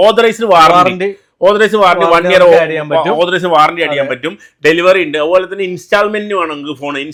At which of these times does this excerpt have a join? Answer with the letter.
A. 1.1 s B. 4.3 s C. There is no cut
C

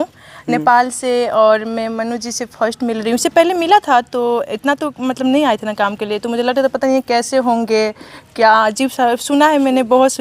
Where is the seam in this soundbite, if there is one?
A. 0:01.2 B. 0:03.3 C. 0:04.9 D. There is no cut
D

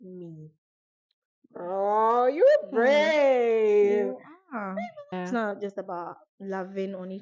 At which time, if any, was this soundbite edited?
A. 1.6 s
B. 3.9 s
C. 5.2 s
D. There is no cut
C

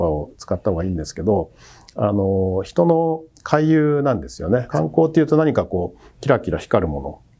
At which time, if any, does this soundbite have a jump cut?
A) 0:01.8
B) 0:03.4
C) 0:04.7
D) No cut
C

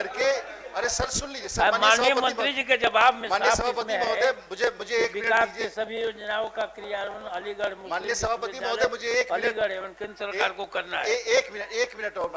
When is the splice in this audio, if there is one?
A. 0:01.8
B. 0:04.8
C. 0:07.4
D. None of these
D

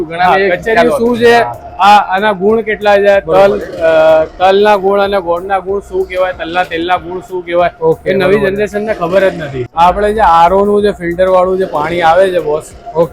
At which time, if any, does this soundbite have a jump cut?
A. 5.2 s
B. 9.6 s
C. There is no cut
B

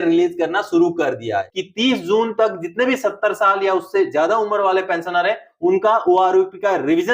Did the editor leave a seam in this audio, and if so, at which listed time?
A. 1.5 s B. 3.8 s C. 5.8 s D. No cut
A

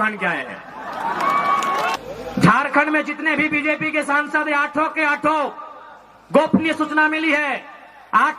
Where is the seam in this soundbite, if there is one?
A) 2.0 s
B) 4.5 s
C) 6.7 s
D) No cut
A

